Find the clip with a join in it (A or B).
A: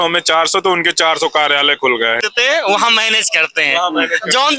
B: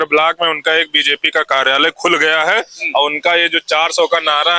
A